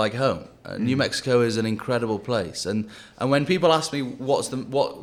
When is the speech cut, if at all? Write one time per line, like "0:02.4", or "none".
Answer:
none